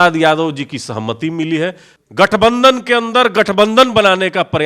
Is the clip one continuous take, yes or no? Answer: no